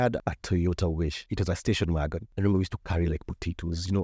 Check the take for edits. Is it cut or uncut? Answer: cut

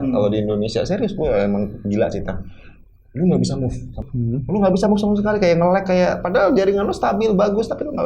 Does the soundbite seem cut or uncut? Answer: cut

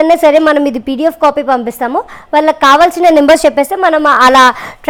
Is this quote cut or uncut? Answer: uncut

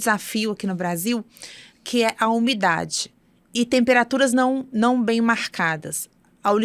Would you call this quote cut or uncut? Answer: uncut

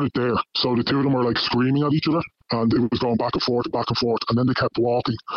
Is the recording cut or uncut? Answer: uncut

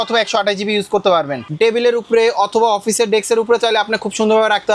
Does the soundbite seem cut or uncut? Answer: cut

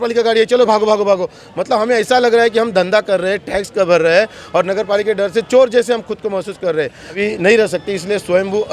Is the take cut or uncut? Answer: cut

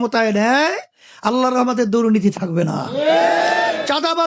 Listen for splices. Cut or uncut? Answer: uncut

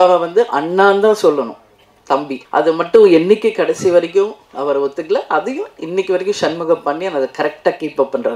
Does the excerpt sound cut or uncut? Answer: cut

